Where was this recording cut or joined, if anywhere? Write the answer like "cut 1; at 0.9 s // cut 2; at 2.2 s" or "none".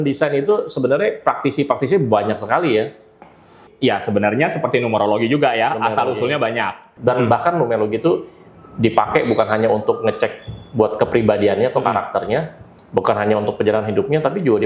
cut 1; at 3.6 s // cut 2; at 6.9 s